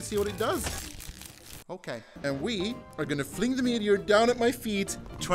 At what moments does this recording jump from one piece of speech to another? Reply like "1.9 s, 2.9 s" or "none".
2.1 s